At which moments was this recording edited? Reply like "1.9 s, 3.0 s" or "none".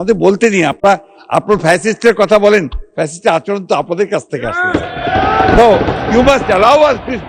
none